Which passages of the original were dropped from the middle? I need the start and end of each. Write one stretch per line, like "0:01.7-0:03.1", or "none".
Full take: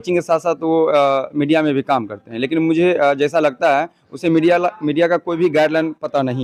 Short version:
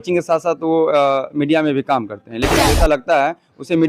0:02.6-0:03.2